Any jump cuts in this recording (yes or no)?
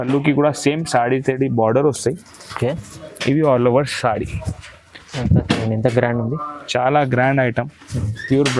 no